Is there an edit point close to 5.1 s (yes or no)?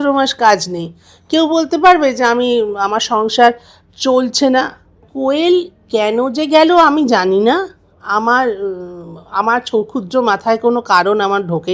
yes